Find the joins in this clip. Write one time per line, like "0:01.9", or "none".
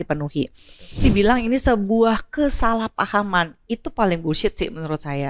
0:01.0